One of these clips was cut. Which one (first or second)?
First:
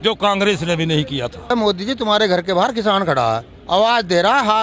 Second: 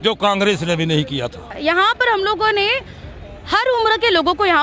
first